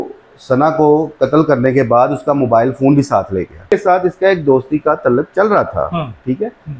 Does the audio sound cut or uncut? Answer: cut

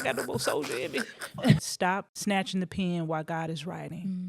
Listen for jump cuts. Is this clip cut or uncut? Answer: cut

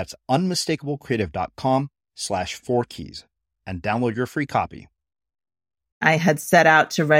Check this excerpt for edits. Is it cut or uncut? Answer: cut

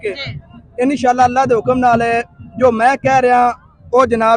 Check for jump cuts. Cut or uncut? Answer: uncut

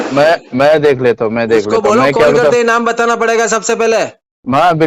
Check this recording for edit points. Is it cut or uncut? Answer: uncut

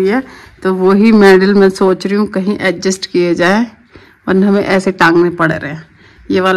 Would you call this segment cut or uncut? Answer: uncut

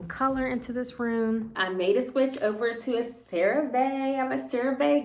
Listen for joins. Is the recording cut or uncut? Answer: cut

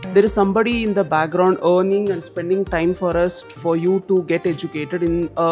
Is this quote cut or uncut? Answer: uncut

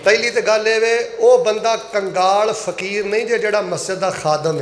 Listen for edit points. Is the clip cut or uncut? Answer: uncut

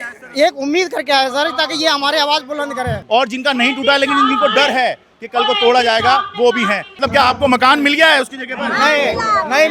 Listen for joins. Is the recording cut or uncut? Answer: cut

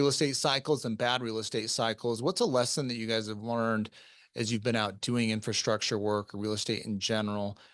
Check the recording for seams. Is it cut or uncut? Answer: uncut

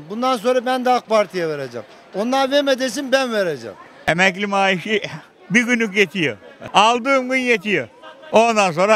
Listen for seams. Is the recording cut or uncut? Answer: cut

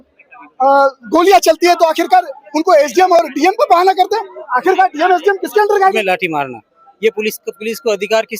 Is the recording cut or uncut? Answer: cut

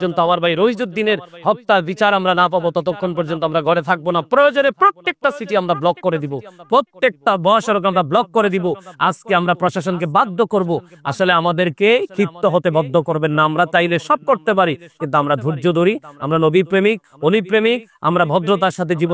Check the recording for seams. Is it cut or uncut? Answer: uncut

